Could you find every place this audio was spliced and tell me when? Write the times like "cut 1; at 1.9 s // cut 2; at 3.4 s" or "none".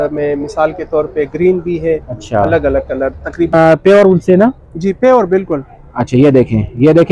cut 1; at 3.5 s